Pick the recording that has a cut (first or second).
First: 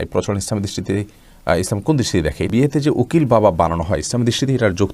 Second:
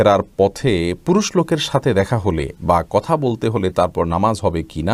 first